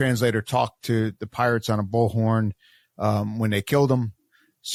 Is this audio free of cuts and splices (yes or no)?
yes